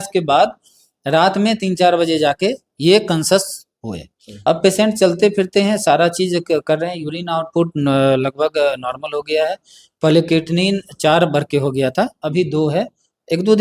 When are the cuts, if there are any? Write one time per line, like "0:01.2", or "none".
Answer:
0:04.2